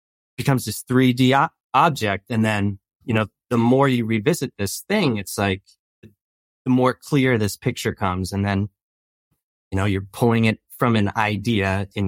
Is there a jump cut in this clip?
no; 0 cuts

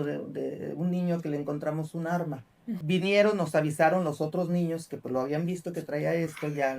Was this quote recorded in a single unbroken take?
no; 1 cut; at 2.8 s

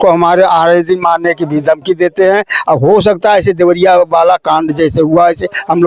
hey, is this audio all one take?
yes; 0 cuts

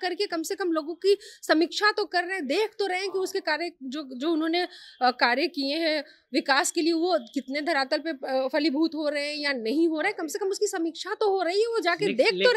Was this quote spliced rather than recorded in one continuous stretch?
no; 0 cuts

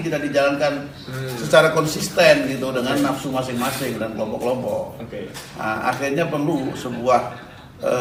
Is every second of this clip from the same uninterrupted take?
yes; 0 cuts

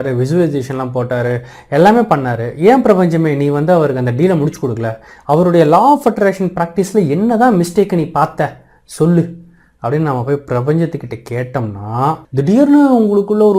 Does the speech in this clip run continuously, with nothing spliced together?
no; 1 cut; at 12.2 s

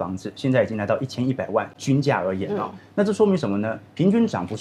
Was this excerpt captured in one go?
yes; 0 cuts

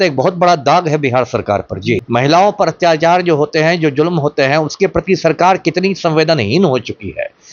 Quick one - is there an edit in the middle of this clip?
yes; 1 cut; at 2.0 s

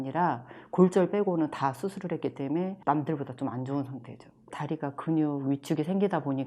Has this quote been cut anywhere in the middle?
no; 0 cuts

